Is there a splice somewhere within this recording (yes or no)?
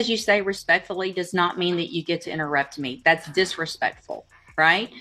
no